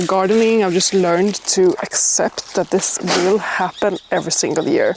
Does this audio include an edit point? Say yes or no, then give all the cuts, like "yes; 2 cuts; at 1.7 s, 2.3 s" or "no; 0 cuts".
no; 0 cuts